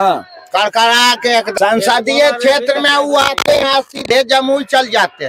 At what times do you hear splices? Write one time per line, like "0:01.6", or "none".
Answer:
0:01.5

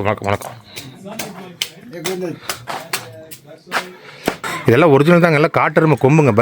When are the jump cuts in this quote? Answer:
0:04.5

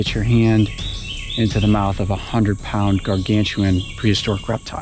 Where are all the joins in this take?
none

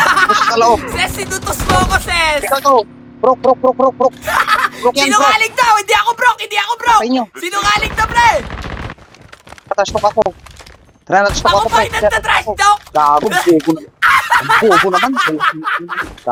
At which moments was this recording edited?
none

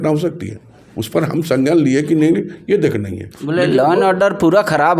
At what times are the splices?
none

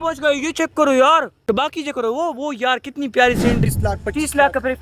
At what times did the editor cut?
0:03.7

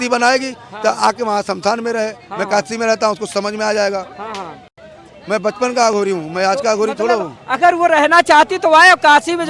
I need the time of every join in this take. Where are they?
none

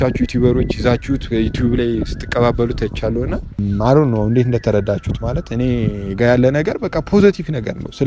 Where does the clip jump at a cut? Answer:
0:03.6

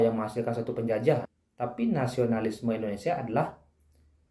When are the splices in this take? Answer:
0:01.4

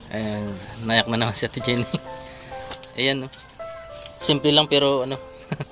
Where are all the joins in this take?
none

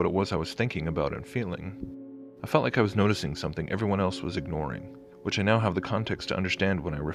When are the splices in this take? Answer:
0:04.9

